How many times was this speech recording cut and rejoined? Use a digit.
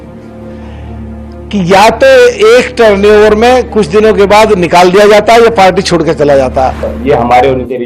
1